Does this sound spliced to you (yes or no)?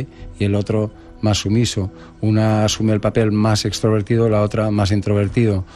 no